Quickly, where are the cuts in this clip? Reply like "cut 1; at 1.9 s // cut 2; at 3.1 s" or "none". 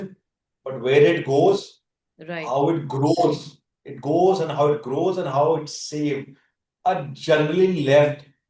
none